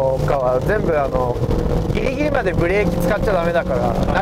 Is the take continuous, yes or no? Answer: yes